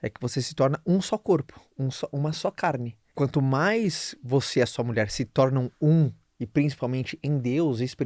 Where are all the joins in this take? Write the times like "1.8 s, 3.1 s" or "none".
3.0 s